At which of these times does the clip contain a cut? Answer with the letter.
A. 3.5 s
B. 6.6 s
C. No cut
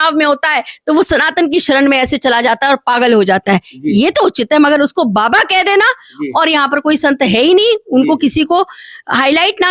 C